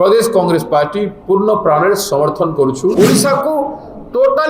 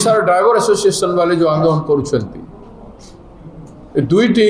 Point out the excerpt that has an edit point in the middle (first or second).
first